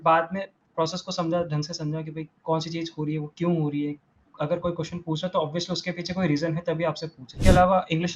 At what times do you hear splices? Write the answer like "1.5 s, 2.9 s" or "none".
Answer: 7.3 s